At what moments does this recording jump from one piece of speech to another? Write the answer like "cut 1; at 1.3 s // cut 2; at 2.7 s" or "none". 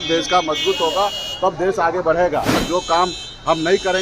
cut 1; at 2.6 s